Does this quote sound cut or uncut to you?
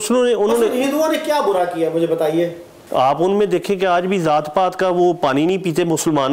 cut